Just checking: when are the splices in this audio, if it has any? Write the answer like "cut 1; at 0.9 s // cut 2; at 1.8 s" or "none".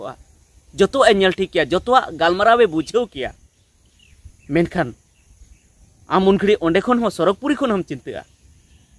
none